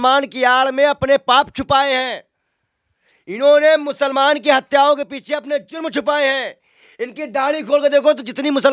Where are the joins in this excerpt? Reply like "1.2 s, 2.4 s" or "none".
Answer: none